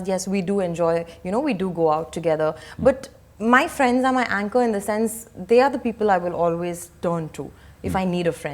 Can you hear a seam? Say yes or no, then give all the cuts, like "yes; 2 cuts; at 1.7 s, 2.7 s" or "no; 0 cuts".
no; 0 cuts